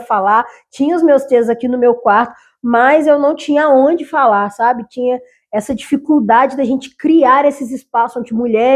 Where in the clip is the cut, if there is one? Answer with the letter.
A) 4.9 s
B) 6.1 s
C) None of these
C